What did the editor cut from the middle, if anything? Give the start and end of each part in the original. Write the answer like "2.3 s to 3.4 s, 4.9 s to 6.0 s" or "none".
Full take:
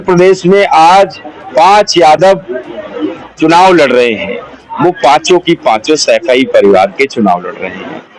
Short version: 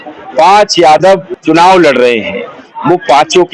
2.5 s to 3.3 s